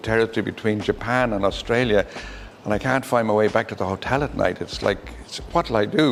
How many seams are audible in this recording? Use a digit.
0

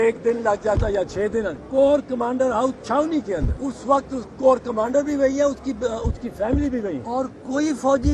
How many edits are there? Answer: 3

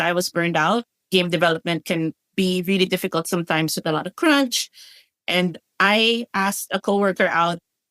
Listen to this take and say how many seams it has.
1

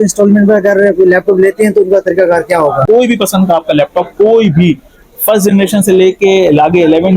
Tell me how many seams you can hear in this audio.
1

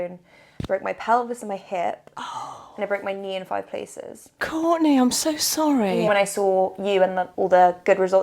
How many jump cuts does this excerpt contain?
3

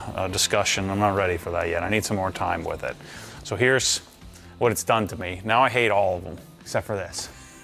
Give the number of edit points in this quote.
0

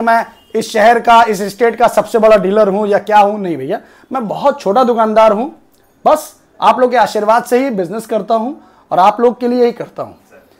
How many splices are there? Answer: 0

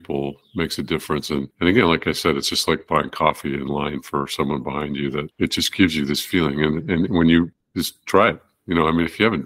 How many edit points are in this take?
3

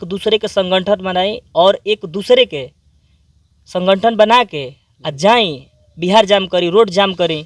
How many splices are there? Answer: 0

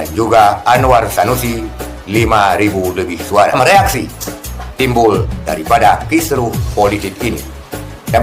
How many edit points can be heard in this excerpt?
1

